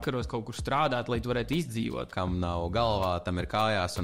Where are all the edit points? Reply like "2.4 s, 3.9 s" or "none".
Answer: 2.1 s